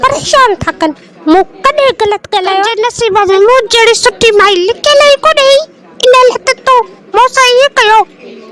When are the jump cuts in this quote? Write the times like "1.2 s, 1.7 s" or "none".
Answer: 2.8 s